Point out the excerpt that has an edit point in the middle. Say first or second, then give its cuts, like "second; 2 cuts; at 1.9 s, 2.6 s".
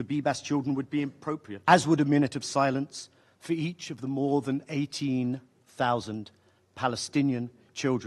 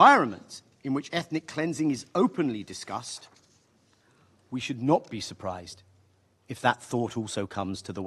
first; 1 cut; at 1.5 s